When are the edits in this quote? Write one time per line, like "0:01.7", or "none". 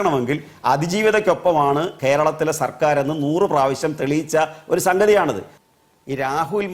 0:05.5

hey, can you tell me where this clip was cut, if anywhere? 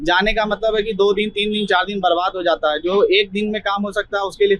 none

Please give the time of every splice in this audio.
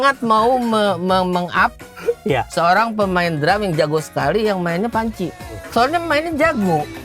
0:05.6

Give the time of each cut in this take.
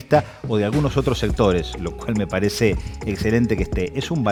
none

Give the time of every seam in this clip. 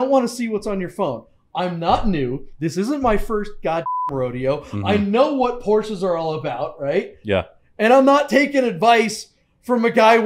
none

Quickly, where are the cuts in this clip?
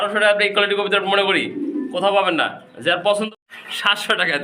0:03.3

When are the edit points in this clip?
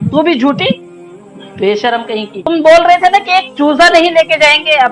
0:02.4

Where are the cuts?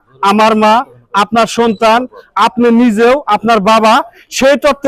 none

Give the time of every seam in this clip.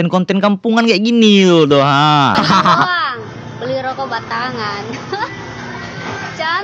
0:02.4

